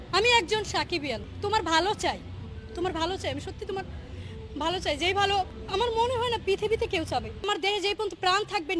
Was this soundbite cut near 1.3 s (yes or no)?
yes